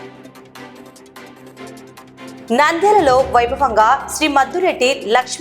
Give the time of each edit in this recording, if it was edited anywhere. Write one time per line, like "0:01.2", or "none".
0:00.8
0:02.4